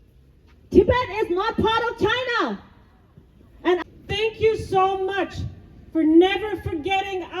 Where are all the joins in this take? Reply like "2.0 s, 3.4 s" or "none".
3.8 s